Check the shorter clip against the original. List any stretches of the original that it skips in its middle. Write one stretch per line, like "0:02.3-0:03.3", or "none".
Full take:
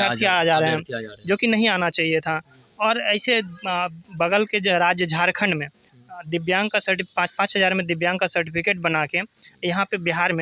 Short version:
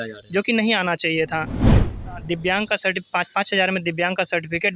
0:02.6-0:05.7